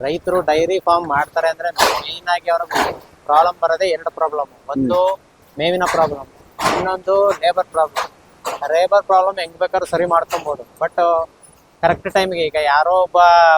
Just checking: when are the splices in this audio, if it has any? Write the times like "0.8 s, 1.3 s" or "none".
none